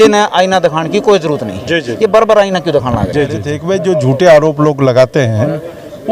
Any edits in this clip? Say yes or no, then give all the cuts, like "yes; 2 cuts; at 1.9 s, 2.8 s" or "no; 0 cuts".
yes; 1 cut; at 3.5 s